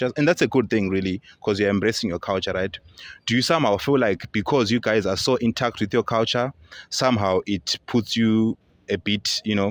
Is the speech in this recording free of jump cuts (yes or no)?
yes